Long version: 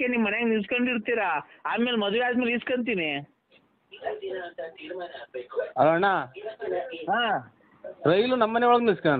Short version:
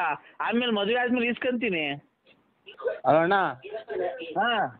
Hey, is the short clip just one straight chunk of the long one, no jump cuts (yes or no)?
no